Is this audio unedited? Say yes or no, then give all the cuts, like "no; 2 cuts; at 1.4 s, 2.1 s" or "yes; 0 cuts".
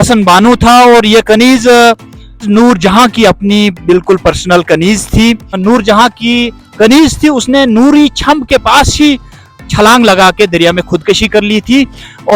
no; 1 cut; at 5.6 s